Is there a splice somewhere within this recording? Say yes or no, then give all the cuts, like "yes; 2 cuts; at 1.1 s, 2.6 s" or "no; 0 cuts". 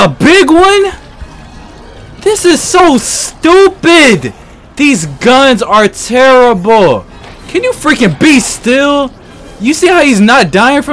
no; 0 cuts